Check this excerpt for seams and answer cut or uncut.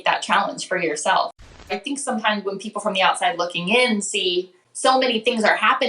cut